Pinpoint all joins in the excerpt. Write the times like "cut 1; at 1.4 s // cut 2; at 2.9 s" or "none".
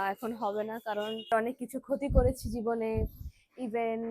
cut 1; at 1.3 s